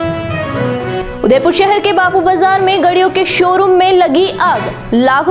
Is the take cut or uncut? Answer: uncut